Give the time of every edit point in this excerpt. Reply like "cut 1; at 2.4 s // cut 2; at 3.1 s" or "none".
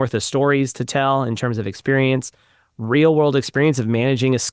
none

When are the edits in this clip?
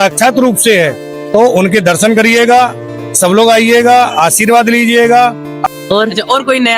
cut 1; at 5.5 s

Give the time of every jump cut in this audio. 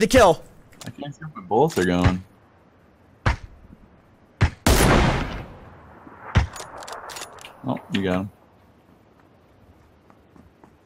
none

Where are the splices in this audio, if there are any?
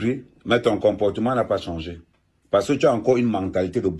cut 1; at 1.7 s

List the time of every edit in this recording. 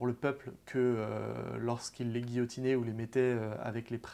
none

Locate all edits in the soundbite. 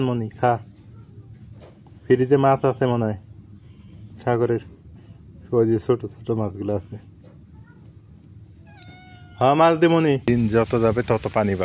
cut 1; at 10.2 s

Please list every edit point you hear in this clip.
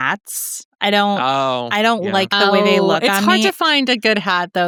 none

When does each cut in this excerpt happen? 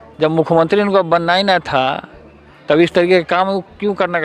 none

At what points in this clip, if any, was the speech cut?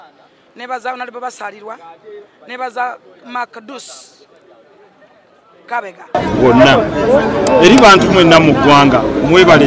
cut 1; at 6.2 s

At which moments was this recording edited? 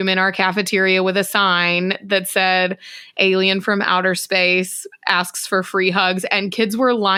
none

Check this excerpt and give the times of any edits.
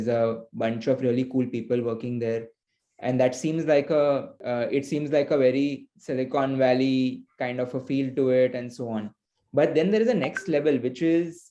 cut 1; at 4.4 s

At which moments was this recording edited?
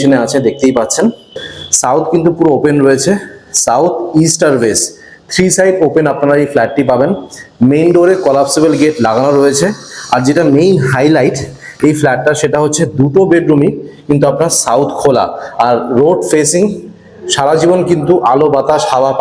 cut 1; at 1.4 s

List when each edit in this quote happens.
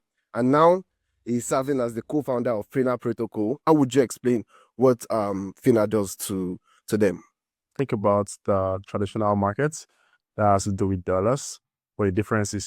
cut 1; at 3.6 s // cut 2; at 7.6 s

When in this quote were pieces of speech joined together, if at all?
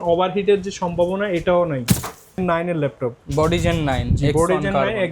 cut 1; at 2.4 s

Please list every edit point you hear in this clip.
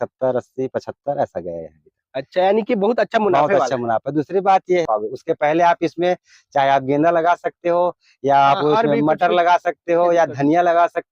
cut 1; at 4.9 s

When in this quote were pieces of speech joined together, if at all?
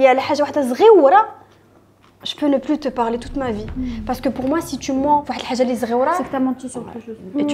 none

